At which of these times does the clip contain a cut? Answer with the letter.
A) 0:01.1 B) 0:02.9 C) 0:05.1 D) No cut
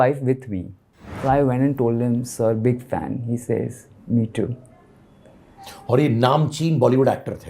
A